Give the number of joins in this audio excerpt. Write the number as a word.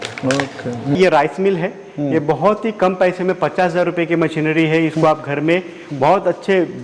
one